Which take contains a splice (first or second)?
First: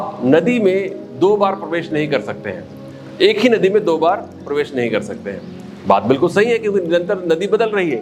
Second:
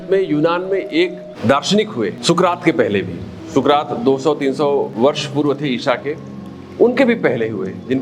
second